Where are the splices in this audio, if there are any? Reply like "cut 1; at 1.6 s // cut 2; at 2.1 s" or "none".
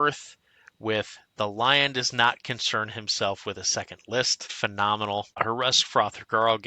cut 1; at 4.4 s // cut 2; at 5.4 s